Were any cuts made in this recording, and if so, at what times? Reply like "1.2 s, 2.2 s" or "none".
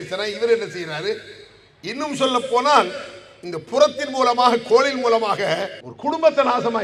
none